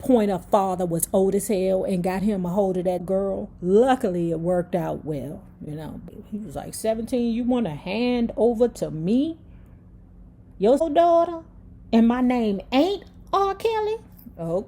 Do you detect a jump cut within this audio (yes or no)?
yes